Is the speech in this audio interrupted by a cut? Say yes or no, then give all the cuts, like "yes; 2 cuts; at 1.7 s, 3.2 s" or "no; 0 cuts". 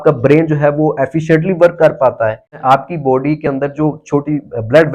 yes; 1 cut; at 2.5 s